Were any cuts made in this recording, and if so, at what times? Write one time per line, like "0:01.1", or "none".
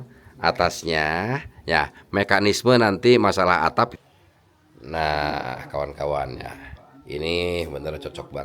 0:03.9